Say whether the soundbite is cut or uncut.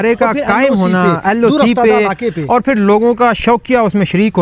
uncut